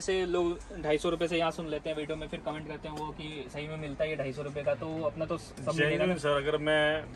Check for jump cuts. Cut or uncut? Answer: uncut